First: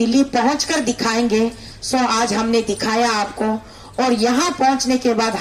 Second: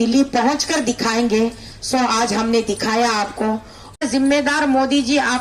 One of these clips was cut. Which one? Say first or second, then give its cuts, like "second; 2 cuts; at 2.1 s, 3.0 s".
second; 1 cut; at 4.0 s